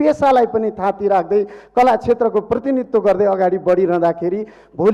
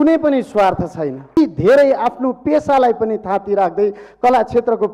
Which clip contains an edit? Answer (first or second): second